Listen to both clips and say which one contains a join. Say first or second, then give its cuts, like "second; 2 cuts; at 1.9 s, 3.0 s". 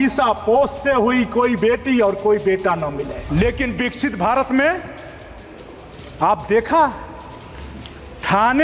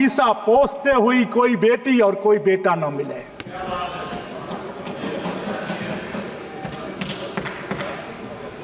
first; 1 cut; at 3.2 s